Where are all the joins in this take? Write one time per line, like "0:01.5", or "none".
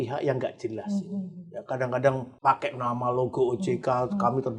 0:02.3